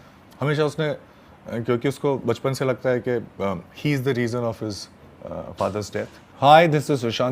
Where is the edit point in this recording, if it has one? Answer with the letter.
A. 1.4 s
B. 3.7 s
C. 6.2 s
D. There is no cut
C